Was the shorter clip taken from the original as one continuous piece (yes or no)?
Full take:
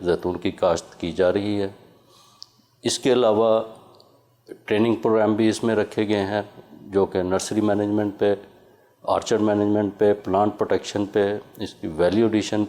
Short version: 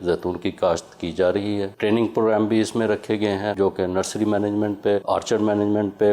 no